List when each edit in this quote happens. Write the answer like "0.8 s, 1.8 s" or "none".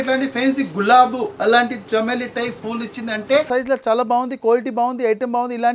3.5 s

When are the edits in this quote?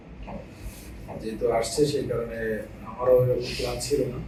none

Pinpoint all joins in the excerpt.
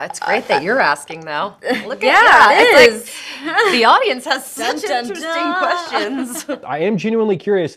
6.6 s

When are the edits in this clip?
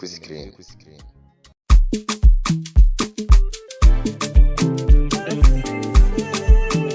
none

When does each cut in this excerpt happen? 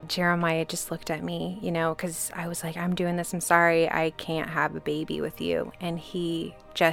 none

